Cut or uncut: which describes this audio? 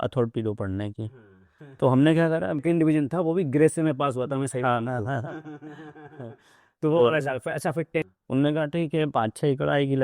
cut